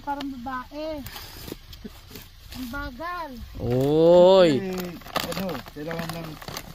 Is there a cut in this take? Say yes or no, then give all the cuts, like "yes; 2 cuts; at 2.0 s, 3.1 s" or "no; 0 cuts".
no; 0 cuts